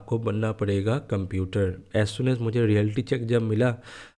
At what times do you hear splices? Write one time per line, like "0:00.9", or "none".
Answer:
0:01.8